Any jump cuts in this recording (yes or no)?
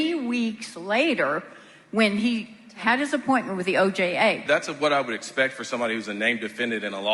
yes